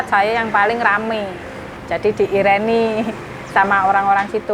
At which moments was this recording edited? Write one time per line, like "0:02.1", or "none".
0:01.7